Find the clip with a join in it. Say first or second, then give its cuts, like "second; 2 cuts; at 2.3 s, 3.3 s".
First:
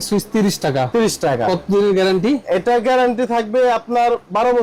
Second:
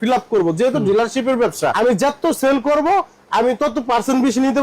second; 1 cut; at 1.7 s